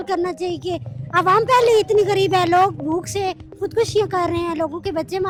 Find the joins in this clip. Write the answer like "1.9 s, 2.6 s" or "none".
none